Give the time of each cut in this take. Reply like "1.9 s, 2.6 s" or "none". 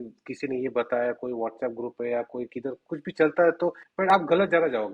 3.9 s